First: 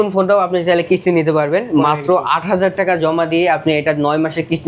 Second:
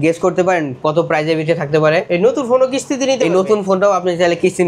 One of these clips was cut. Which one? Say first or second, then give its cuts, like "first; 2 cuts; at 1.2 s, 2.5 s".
second; 1 cut; at 2.1 s